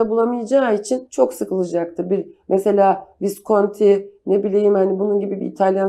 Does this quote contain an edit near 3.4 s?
no; 1 cut; at 1.1 s

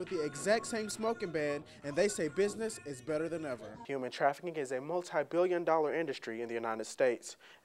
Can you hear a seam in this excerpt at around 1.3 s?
no; 1 cut; at 3.7 s

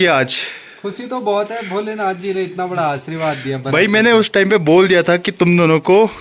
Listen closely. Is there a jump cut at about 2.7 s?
no; 0 cuts

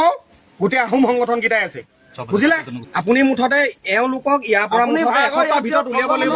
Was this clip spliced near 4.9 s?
no; 1 cut; at 2.9 s

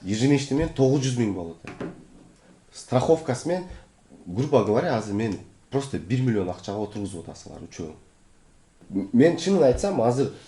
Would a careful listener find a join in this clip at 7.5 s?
no; 1 cut; at 8.8 s

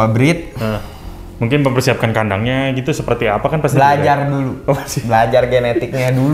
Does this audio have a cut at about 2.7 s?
no; 0 cuts

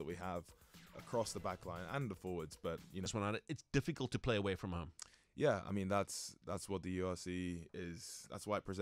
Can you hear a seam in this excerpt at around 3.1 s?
yes; 1 cut; at 3.1 s

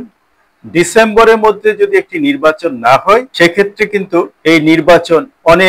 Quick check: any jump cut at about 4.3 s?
yes; 2 cuts; at 3.3 s, 4.3 s

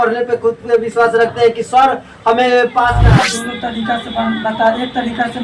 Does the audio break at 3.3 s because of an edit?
yes; 1 cut; at 3.3 s

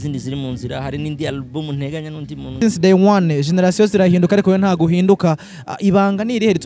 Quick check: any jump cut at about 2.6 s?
yes; 1 cut; at 2.6 s

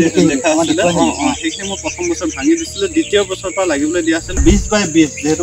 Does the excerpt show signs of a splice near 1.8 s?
no; 1 cut; at 4.4 s

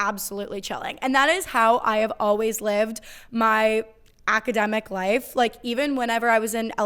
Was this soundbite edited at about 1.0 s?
no; 0 cuts

